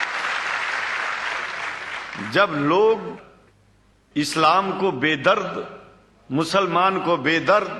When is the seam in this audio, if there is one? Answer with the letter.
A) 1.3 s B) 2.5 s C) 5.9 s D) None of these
D